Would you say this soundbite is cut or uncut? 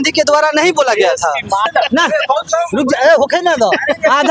cut